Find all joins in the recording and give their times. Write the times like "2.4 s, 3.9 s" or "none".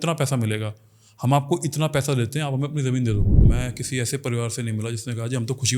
3.4 s